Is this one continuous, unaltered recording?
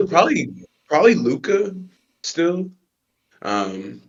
yes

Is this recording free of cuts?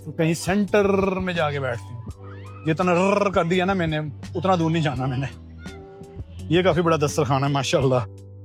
yes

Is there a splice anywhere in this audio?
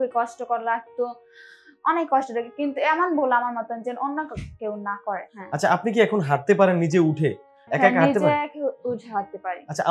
yes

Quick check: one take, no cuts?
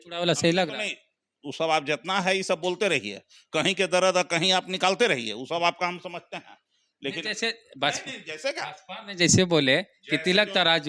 yes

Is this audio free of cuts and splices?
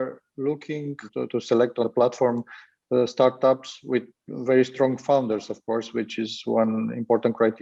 yes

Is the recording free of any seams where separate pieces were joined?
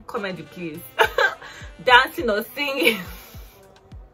yes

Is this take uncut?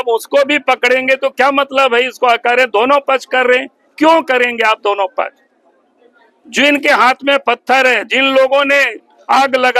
yes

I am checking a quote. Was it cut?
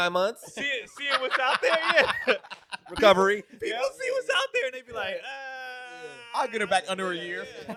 no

